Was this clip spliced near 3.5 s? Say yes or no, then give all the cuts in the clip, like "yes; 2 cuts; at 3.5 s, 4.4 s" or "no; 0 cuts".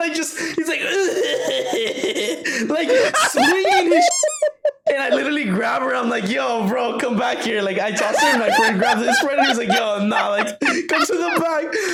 no; 0 cuts